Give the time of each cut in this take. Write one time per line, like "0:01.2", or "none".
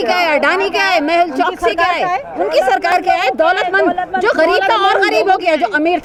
none